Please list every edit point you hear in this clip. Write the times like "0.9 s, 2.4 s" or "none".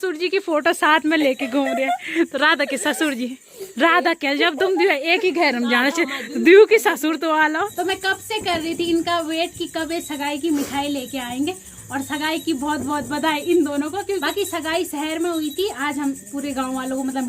7.7 s, 14.2 s

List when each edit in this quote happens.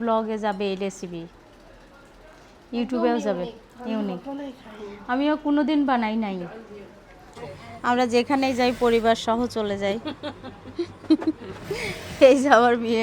7.5 s

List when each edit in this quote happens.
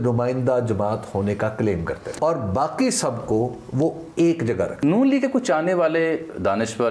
2.1 s, 4.8 s

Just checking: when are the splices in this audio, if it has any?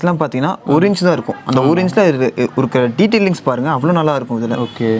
none

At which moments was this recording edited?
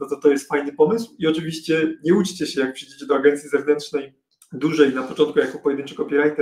none

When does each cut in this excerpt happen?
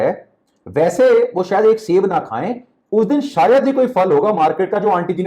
none

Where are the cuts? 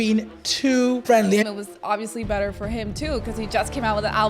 1.5 s

